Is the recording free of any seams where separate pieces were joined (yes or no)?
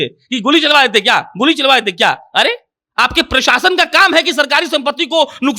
yes